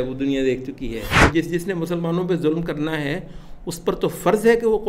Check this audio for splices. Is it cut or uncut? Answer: cut